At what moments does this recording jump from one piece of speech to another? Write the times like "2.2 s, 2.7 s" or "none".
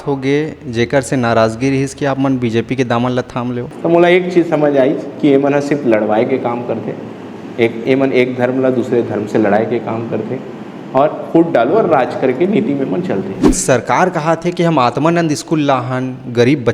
3.7 s, 13.6 s